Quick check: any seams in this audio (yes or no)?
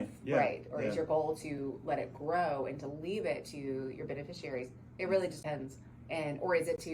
yes